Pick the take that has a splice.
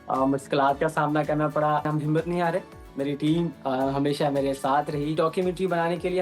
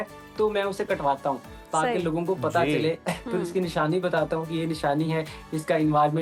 first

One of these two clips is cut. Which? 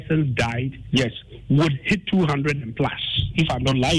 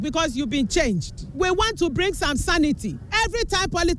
second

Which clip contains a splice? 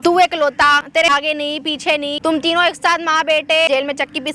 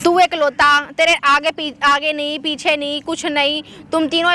first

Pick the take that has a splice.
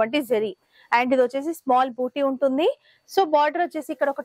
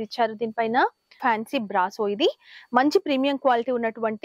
second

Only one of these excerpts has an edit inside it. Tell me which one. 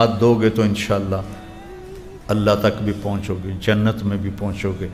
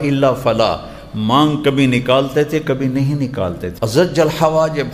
second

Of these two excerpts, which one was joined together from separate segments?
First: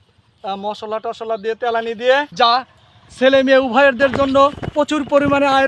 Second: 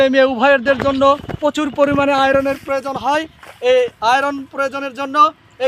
first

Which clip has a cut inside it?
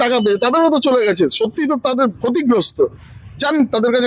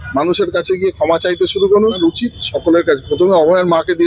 second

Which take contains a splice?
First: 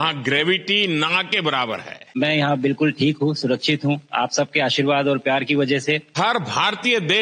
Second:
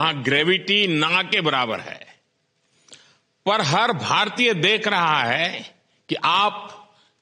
first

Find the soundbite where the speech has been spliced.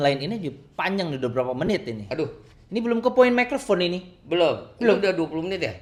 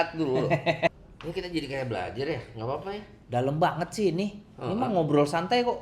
second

